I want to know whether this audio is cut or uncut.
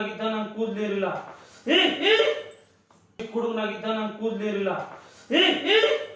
uncut